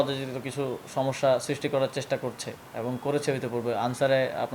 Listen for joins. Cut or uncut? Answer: uncut